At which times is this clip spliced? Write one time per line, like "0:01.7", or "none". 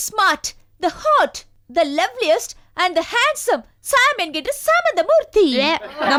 none